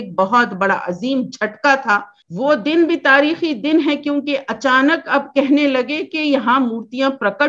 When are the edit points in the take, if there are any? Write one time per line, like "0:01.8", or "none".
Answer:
0:02.2